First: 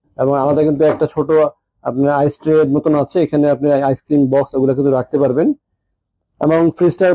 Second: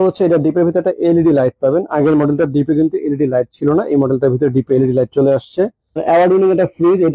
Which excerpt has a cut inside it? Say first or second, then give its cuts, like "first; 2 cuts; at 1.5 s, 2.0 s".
second; 1 cut; at 5.9 s